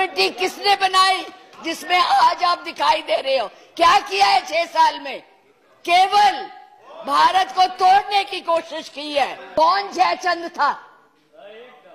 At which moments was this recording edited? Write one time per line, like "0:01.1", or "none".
0:09.4